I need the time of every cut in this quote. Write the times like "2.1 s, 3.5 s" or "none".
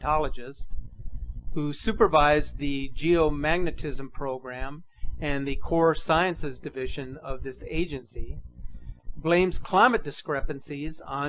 2.0 s